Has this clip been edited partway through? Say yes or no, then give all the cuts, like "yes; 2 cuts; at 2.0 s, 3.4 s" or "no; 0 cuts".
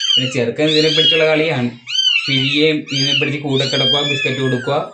no; 0 cuts